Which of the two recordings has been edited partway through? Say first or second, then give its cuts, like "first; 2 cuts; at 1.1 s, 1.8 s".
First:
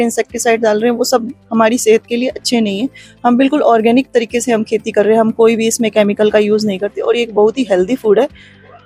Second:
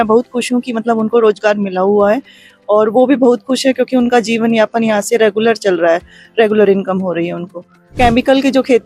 second; 1 cut; at 7.9 s